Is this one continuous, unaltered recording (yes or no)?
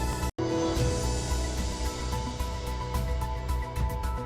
no